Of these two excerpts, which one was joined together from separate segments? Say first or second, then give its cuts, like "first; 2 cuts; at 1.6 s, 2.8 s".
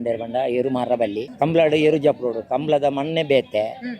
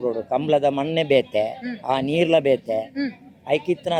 first; 1 cut; at 1.3 s